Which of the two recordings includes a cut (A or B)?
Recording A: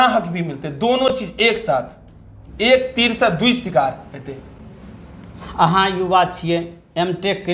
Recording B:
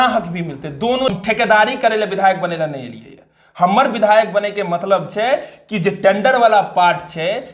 B